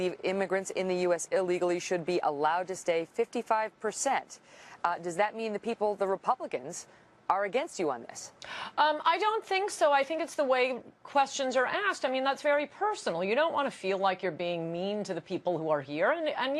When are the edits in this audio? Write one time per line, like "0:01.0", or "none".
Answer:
0:02.0